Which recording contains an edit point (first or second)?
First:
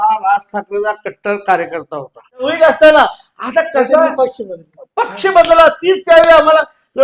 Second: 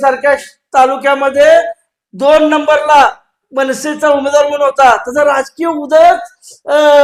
first